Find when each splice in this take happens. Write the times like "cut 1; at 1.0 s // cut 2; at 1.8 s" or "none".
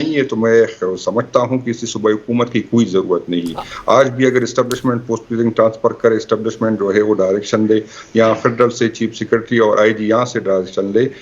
none